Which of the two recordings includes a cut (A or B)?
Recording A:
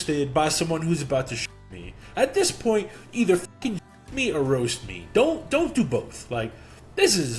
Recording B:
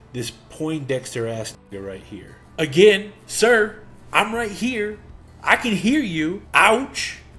B